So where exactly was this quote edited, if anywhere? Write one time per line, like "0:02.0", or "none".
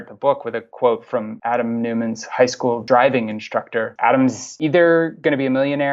0:01.3
0:02.8
0:03.9
0:04.5
0:05.1